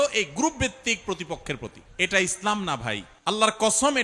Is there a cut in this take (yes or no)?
yes